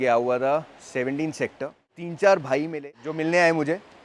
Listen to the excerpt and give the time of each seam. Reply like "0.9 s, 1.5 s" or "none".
2.0 s, 3.0 s